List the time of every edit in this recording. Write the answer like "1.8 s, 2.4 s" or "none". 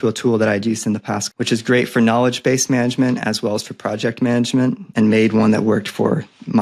1.2 s, 4.9 s